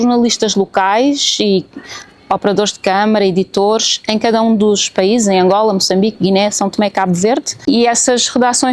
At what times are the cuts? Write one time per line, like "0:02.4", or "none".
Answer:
0:07.6

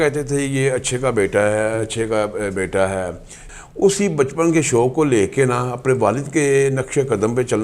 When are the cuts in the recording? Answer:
0:03.4

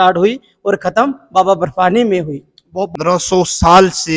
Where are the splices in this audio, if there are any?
0:02.9

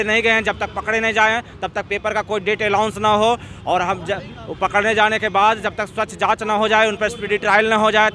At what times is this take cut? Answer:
none

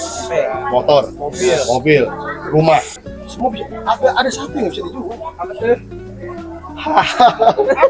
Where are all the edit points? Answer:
0:03.0

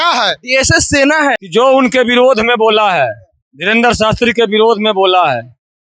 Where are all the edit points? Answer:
0:01.4

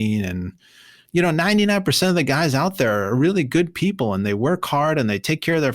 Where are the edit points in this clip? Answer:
0:01.0

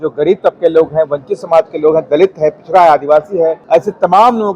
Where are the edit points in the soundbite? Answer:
0:03.6

